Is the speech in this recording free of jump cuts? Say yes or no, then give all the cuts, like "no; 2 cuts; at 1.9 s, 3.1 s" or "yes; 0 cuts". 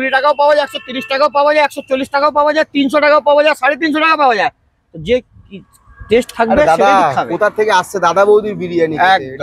yes; 0 cuts